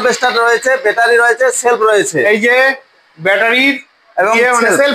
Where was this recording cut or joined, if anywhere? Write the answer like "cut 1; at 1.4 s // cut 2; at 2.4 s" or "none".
none